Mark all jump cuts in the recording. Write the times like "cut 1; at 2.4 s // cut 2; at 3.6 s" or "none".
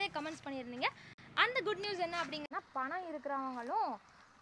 cut 1; at 2.4 s